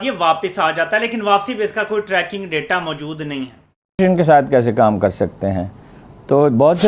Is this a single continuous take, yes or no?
no